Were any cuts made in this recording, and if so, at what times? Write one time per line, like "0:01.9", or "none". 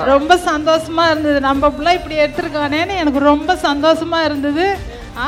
none